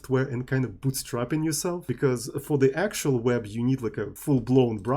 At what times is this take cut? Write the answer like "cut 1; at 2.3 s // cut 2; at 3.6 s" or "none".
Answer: cut 1; at 1.8 s // cut 2; at 4.1 s